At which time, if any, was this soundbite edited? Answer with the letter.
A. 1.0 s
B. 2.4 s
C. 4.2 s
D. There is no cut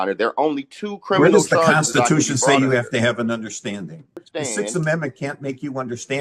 C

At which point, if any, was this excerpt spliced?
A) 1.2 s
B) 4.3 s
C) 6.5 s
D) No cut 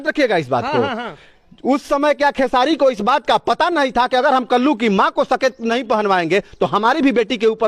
D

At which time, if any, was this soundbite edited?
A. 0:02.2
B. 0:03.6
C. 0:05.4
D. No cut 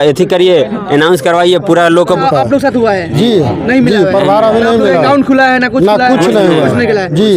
A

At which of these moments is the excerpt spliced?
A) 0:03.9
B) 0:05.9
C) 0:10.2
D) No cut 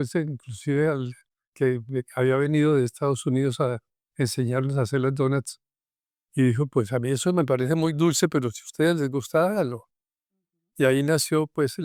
D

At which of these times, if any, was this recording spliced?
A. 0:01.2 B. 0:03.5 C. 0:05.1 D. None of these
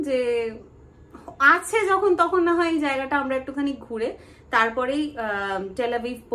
D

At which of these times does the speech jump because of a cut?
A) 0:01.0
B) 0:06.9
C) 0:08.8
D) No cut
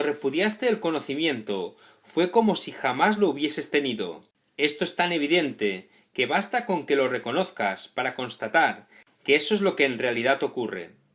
A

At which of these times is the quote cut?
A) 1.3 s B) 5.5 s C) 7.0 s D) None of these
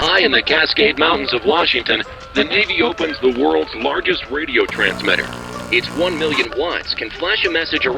D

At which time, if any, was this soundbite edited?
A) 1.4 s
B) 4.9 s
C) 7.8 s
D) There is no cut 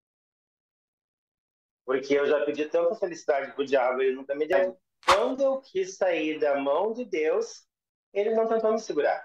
B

